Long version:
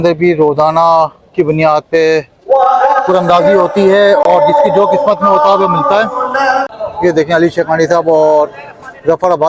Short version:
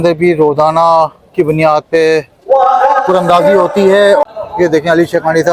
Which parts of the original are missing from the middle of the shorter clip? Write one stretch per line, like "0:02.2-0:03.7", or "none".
0:04.2-0:06.7